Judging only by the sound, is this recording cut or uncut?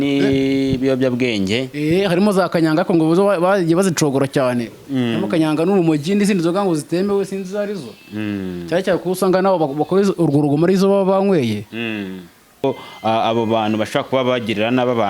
cut